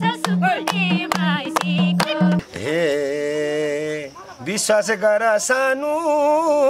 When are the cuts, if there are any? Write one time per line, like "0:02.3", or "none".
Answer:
0:02.4